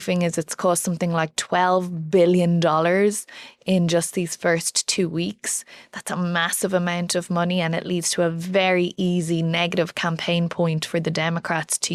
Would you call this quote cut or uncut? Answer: uncut